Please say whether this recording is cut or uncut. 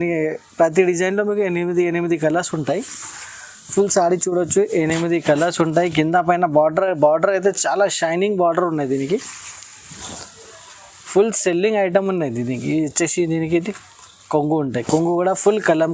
uncut